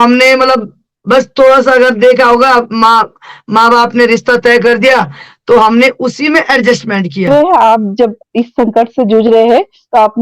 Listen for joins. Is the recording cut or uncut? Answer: cut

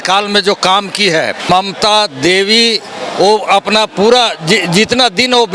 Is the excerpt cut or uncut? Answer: cut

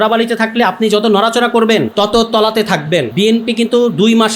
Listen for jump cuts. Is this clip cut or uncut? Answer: cut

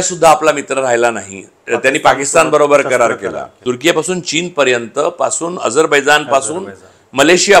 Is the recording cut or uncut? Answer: cut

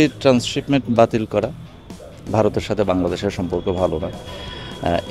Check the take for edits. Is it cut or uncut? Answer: uncut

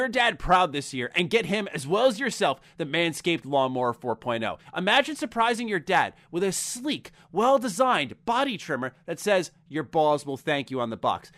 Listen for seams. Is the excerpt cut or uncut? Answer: cut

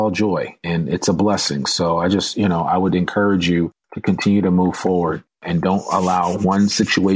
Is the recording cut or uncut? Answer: uncut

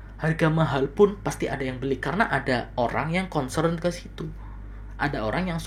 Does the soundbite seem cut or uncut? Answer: uncut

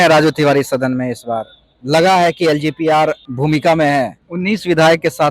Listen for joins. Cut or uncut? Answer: cut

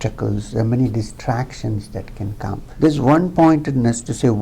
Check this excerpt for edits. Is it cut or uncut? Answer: cut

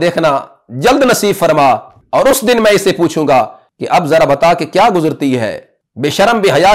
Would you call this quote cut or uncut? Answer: cut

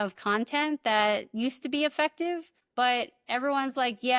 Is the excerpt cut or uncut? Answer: cut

